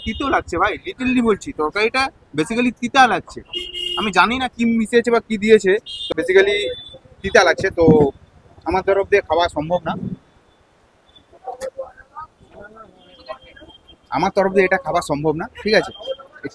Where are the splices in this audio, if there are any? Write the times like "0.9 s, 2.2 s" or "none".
6.0 s